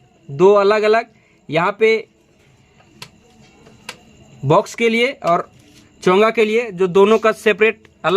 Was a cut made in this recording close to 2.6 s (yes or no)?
no